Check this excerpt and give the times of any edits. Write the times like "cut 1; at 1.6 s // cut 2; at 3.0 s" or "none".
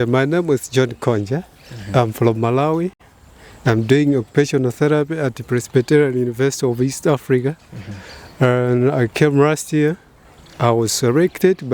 none

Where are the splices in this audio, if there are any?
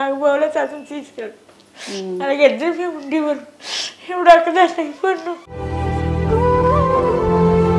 none

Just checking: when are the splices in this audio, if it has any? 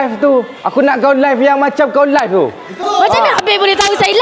cut 1; at 2.8 s

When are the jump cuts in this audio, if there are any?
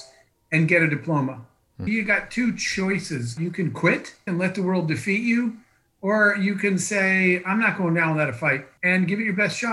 cut 1; at 1.8 s // cut 2; at 3.3 s // cut 3; at 4.3 s // cut 4; at 8.7 s

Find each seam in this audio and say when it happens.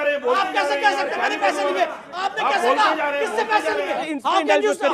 cut 1; at 4.0 s

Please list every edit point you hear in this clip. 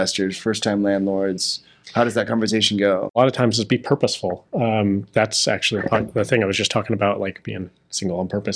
cut 1; at 3.1 s

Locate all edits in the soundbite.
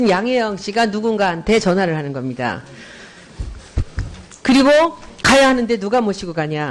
none

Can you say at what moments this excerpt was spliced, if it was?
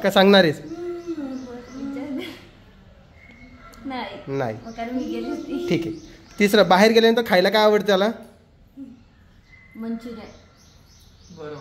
none

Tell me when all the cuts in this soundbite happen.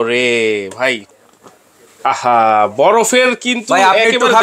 cut 1; at 1.1 s

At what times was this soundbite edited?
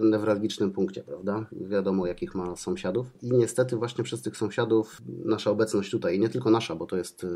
cut 1; at 1.6 s // cut 2; at 3.2 s // cut 3; at 4.9 s

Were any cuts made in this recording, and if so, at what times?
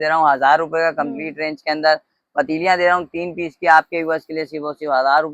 none

